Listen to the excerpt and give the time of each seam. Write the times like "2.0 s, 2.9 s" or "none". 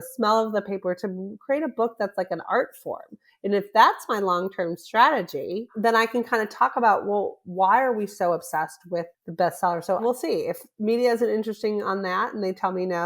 5.7 s, 9.2 s, 10.0 s

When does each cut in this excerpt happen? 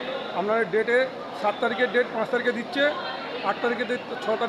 none

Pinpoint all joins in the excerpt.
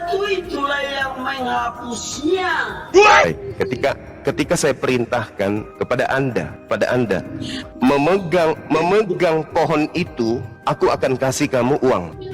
3.2 s

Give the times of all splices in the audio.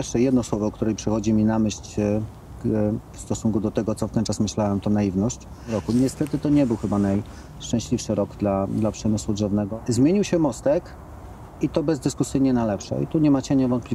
5.8 s, 9.7 s

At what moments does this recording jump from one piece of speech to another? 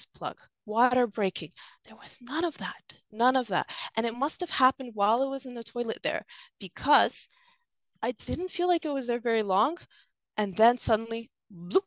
7.8 s

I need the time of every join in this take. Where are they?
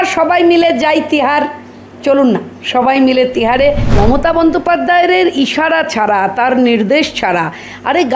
4.0 s

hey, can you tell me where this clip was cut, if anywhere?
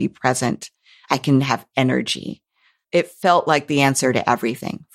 2.8 s

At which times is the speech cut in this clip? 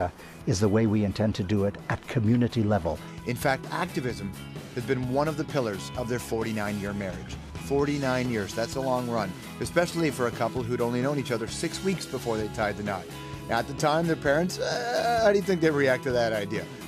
9.2 s

